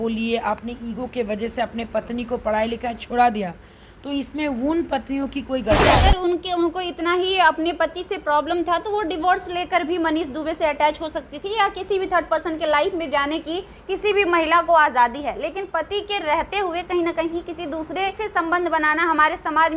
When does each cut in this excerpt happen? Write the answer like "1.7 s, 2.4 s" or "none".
5.9 s, 18.2 s